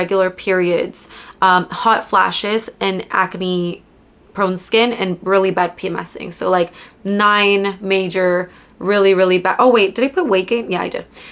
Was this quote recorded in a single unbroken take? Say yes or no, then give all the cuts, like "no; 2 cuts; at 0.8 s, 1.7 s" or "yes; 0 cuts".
yes; 0 cuts